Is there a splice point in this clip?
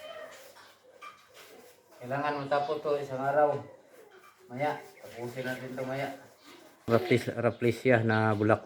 yes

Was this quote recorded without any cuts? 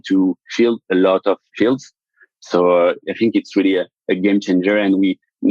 no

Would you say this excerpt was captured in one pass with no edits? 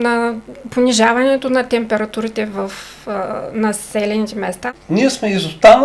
no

